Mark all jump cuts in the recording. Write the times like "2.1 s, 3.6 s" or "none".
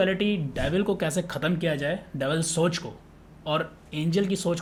none